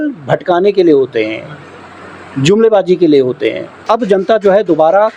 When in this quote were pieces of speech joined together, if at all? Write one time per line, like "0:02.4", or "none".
0:03.8